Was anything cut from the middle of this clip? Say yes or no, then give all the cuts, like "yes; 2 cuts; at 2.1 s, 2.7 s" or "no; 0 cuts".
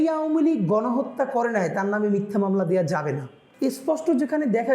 yes; 1 cut; at 3.4 s